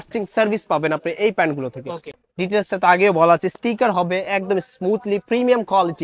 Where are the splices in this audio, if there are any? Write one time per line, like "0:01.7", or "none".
0:02.2